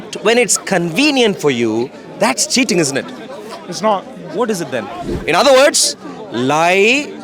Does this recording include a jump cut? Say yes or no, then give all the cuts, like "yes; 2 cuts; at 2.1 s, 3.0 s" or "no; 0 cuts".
yes; 1 cut; at 5.1 s